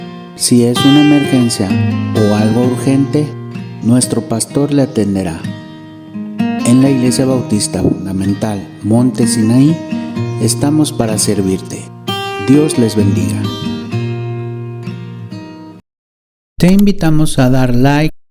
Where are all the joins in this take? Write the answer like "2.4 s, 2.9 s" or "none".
15.9 s